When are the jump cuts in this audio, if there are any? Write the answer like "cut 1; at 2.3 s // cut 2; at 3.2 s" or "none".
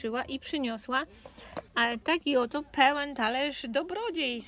none